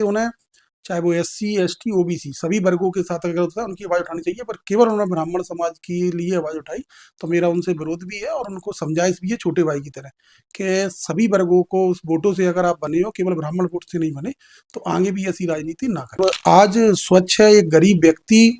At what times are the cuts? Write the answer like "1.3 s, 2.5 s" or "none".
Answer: 16.2 s